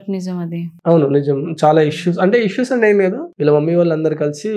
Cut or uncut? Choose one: cut